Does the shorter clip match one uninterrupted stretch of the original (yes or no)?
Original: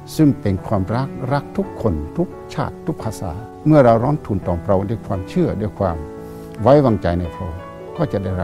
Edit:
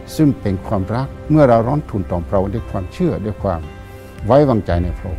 no